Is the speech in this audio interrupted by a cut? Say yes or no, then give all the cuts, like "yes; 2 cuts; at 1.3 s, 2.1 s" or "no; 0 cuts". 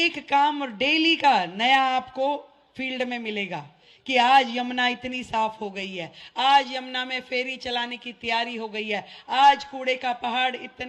no; 0 cuts